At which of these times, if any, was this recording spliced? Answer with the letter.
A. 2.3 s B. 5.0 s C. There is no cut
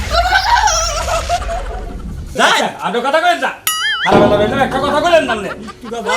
A